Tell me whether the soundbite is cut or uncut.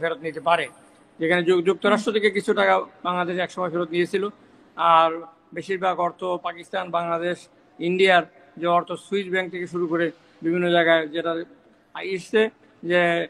uncut